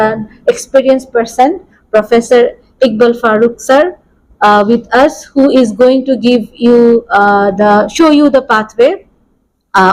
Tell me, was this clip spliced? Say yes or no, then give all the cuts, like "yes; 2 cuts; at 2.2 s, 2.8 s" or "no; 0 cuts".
no; 0 cuts